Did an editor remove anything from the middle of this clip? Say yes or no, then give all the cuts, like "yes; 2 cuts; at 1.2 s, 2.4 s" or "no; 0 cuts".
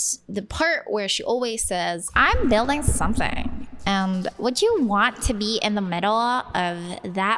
yes; 1 cut; at 2.1 s